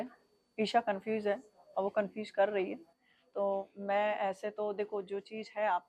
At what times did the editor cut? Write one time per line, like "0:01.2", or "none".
none